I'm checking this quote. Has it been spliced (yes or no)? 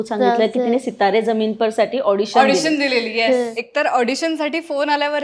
yes